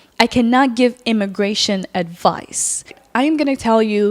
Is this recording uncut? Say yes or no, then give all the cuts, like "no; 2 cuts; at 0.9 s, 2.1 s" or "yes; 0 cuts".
no; 1 cut; at 3.0 s